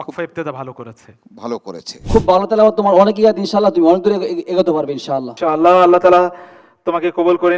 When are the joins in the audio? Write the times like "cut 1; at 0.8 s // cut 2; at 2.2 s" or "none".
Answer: cut 1; at 1.9 s

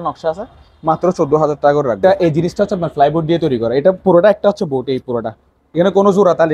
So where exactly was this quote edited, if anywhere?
cut 1; at 2.0 s

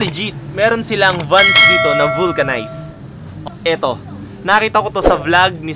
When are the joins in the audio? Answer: none

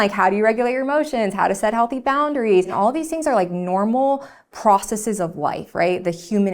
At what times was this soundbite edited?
cut 1; at 2.7 s

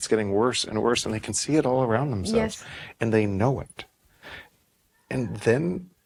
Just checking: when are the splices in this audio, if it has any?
none

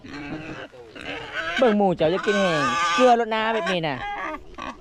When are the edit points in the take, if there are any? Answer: none

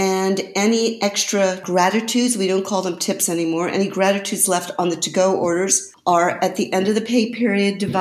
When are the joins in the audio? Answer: cut 1; at 1.6 s // cut 2; at 5.9 s

